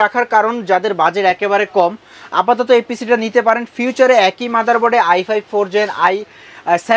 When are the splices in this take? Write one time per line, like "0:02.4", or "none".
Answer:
none